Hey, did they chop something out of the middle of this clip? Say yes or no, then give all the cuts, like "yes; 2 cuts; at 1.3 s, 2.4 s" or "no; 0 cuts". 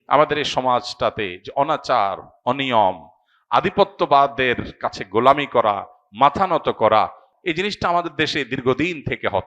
yes; 1 cut; at 7.3 s